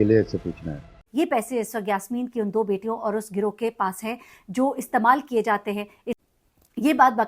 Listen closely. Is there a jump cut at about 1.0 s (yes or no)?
yes